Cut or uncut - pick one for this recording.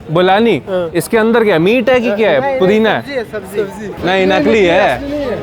cut